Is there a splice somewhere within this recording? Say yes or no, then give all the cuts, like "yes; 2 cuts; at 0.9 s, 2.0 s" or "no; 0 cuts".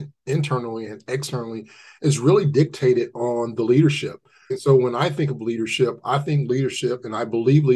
no; 0 cuts